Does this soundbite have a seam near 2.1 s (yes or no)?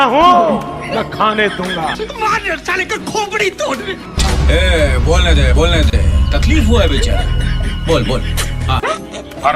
yes